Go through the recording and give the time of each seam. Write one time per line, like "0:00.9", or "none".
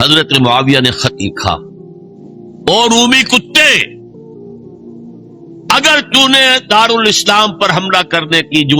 0:04.0
0:05.7